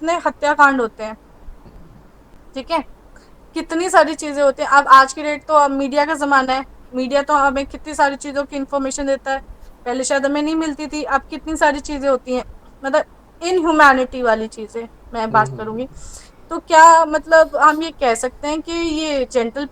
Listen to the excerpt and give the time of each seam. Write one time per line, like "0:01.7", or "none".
none